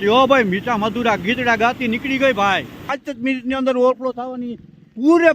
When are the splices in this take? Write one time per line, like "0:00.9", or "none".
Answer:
0:02.9